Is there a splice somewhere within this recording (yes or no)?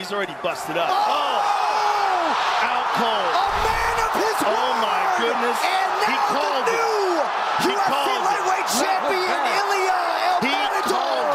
no